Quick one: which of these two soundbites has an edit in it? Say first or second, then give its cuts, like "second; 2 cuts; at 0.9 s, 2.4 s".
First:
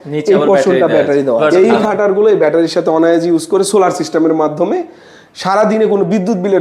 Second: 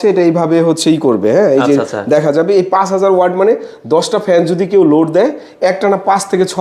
first; 1 cut; at 1.4 s